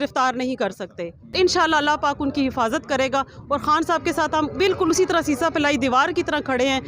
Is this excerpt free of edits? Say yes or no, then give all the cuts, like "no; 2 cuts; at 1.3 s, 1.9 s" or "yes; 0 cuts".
no; 1 cut; at 1.3 s